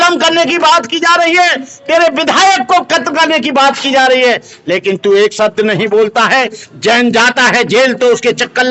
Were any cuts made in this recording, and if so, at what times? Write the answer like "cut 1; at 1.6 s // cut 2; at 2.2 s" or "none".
none